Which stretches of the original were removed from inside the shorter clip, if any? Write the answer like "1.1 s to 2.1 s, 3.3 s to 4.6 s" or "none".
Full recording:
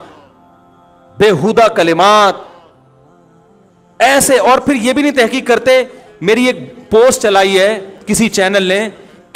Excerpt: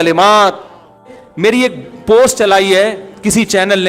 3.0 s to 6.0 s